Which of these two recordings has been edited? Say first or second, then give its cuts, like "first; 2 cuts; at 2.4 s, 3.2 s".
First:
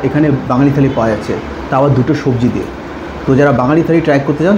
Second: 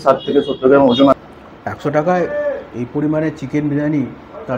second; 1 cut; at 1.2 s